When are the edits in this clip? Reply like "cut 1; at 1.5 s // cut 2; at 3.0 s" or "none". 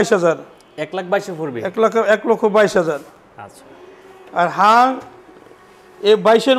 none